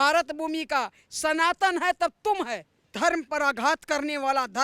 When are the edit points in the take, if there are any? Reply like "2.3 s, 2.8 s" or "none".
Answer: 2.8 s